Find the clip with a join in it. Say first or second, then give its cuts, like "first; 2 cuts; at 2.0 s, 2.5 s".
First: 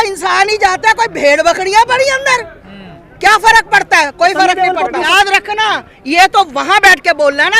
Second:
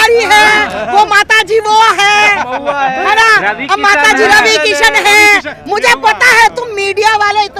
first; 1 cut; at 5.1 s